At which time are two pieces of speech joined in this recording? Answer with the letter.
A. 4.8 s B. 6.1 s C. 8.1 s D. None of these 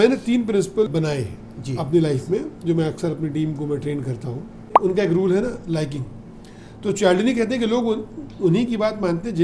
A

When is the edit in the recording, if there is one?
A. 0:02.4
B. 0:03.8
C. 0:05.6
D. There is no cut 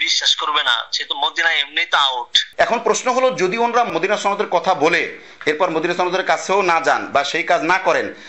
A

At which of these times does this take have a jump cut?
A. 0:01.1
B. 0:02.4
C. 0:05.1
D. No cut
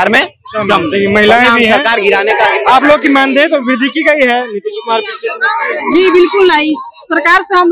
D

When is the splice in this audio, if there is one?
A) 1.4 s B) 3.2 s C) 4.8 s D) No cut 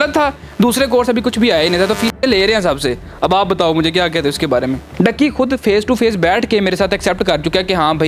D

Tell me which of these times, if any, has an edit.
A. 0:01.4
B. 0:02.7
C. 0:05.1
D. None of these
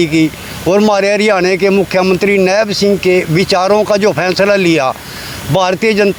D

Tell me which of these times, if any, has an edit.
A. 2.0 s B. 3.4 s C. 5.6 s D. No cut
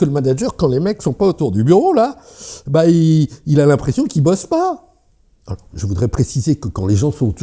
D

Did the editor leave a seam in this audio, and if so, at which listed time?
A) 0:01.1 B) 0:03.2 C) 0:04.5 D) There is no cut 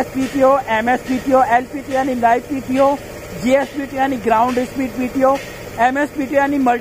D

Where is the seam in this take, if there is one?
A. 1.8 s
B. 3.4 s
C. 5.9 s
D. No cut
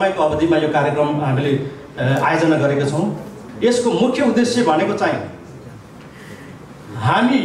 B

